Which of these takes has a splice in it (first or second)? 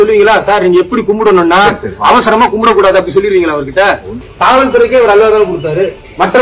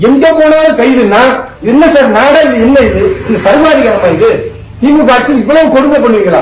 first